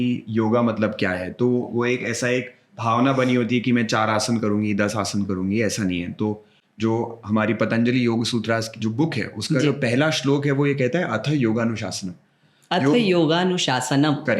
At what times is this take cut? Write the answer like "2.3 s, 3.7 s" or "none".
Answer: none